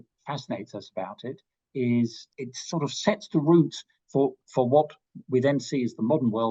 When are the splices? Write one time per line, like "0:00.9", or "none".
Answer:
0:02.3